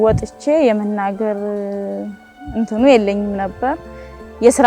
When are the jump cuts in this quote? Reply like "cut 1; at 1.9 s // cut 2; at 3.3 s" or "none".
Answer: none